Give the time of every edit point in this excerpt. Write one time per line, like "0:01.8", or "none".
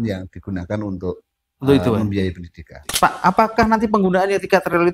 0:02.9